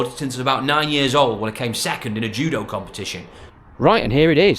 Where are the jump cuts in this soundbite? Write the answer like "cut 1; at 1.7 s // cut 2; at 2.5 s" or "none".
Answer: cut 1; at 3.5 s